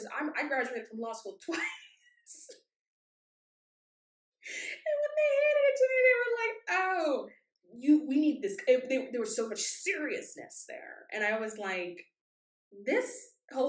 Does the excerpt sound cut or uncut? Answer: uncut